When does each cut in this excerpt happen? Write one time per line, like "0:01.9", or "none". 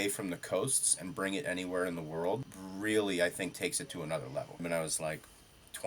0:02.6
0:04.6